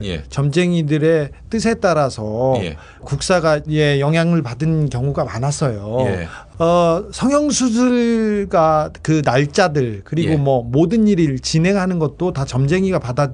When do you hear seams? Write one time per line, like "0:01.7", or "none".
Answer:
none